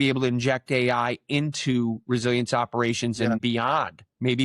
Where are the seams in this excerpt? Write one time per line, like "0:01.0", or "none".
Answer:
0:03.4